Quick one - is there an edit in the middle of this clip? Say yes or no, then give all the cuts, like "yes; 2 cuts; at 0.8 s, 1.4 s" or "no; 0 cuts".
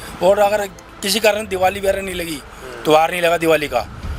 no; 0 cuts